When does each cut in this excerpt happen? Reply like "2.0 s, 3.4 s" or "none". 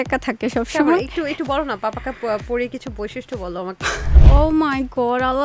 4.2 s